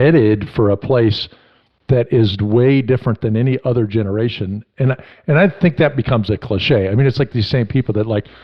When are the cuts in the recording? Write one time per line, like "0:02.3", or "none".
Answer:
none